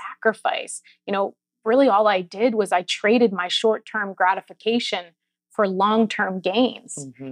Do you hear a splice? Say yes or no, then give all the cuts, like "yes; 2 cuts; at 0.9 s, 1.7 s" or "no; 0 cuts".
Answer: no; 0 cuts